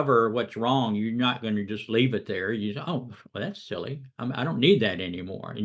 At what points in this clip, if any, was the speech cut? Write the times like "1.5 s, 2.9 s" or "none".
none